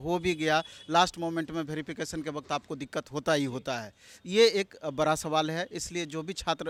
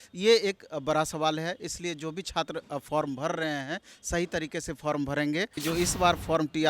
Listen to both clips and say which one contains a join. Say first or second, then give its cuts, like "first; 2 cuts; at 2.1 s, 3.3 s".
second; 1 cut; at 5.6 s